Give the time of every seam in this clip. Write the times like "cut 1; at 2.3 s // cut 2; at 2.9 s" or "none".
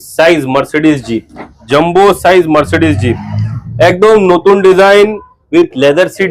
cut 1; at 1.5 s

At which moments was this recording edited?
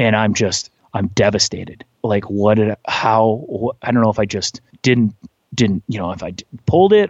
cut 1; at 1.9 s

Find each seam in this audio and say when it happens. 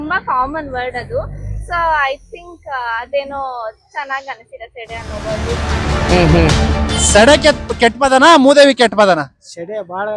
cut 1; at 6.5 s

